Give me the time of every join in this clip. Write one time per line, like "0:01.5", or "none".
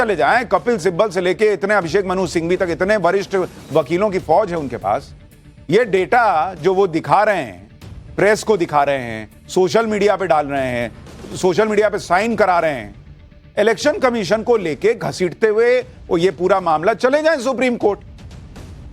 0:03.8